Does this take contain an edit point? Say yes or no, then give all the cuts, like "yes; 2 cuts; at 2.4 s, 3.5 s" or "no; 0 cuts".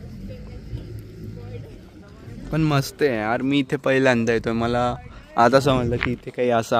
no; 0 cuts